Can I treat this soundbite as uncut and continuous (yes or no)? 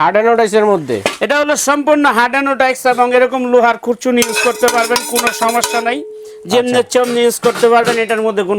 yes